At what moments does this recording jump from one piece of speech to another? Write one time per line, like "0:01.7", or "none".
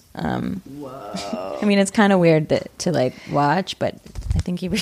0:01.4